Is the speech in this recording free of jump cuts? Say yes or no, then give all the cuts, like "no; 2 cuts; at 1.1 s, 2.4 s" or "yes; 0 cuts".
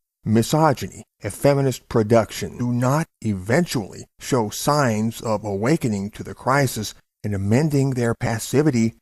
yes; 0 cuts